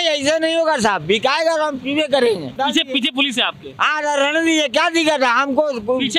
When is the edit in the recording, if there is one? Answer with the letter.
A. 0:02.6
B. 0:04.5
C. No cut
A